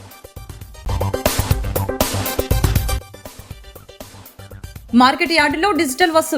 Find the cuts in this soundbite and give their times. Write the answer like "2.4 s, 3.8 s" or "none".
1.9 s